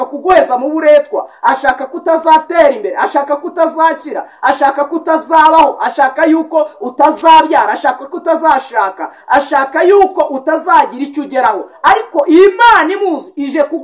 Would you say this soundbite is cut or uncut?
uncut